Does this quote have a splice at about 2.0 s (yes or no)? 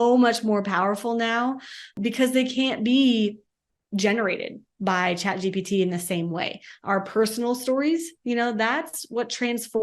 yes